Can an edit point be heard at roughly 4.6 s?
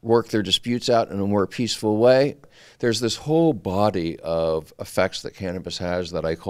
no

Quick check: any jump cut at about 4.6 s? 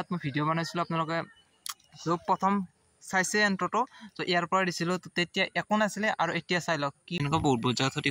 no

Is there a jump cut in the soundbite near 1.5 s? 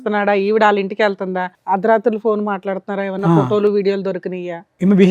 yes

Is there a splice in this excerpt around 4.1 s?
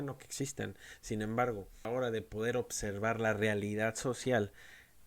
no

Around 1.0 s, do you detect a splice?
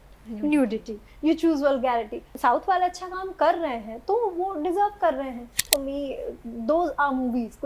no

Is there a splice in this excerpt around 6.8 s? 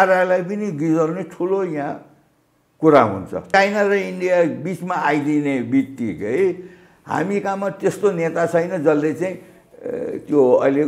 no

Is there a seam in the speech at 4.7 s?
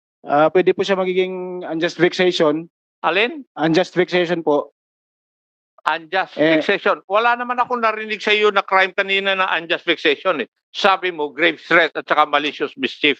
no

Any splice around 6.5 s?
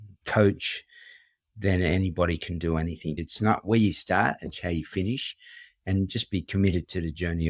no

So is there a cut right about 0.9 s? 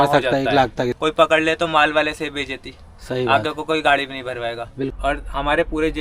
yes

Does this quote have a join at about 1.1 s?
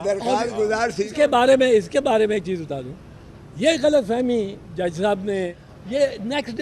yes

